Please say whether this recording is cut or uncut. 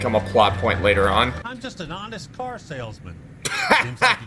cut